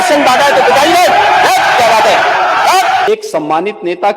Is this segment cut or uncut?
cut